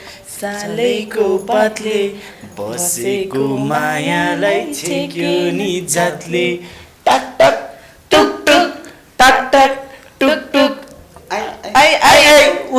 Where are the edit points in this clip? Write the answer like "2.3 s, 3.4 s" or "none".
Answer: none